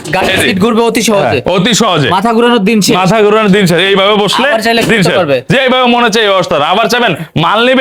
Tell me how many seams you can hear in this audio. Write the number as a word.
zero